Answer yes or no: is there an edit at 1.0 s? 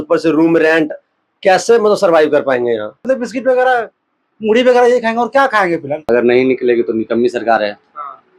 no